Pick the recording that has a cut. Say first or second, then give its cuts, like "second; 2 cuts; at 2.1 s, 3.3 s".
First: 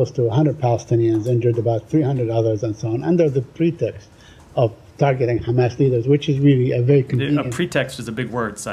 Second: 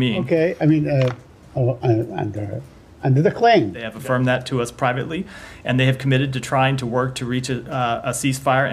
second; 1 cut; at 3.9 s